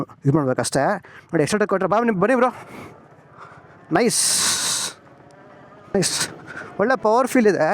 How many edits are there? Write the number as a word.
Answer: one